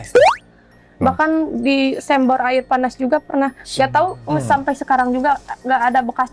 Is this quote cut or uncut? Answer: uncut